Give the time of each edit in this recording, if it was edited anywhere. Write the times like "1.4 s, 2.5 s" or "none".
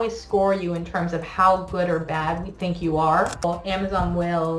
3.4 s